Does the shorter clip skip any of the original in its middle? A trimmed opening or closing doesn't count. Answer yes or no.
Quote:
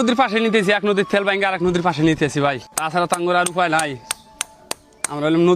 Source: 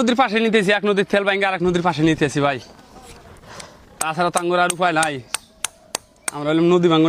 yes